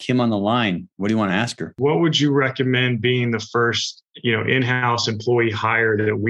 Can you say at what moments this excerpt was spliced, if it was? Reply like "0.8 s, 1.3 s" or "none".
1.7 s